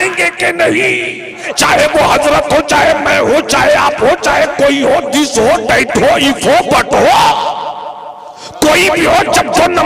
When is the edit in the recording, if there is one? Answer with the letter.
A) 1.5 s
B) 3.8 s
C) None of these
A